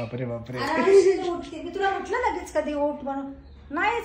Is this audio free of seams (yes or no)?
yes